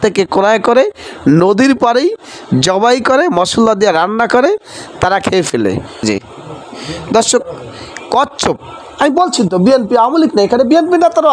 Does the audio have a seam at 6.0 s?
yes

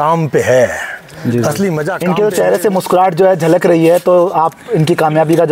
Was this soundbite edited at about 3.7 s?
no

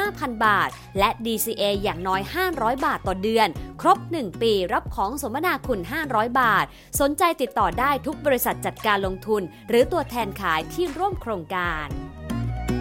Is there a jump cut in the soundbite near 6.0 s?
no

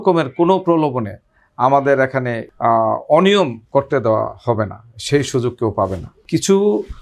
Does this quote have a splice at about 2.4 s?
yes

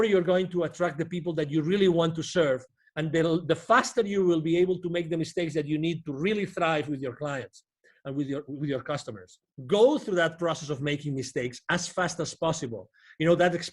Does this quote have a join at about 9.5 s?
yes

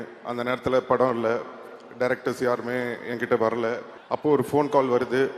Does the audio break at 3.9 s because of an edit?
yes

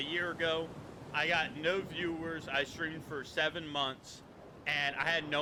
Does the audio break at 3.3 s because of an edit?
no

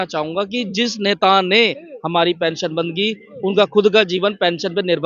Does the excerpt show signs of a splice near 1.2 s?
no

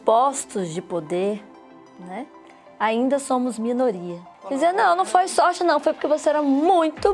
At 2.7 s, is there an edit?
no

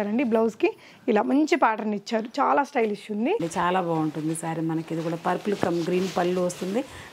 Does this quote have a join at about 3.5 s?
yes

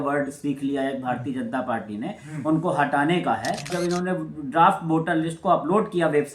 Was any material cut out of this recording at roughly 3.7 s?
yes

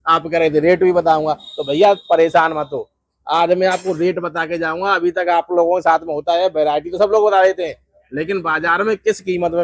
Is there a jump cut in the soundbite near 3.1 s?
no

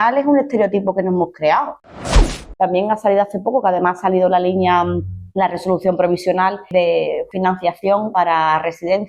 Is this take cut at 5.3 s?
no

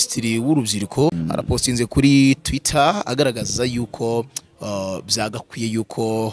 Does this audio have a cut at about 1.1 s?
yes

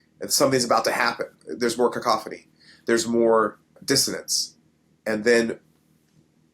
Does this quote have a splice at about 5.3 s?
no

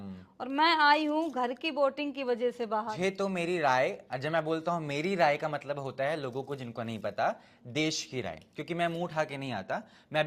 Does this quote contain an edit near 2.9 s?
yes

